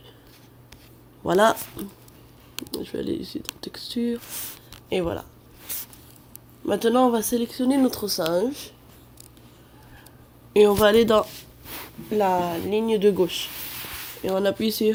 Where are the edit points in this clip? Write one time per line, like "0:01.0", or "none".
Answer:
none